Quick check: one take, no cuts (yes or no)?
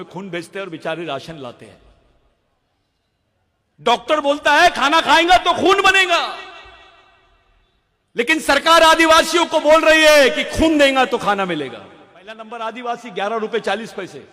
no